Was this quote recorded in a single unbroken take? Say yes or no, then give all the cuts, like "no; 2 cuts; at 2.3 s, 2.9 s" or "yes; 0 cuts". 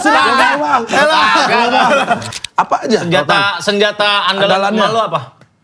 no; 1 cut; at 2.4 s